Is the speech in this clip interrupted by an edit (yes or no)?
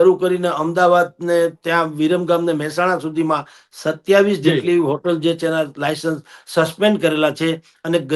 no